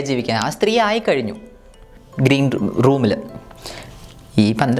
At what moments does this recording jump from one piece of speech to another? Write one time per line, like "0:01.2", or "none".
0:01.9